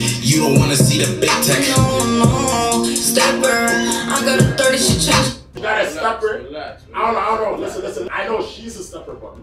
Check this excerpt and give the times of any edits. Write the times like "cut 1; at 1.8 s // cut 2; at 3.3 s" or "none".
cut 1; at 5.5 s // cut 2; at 8.1 s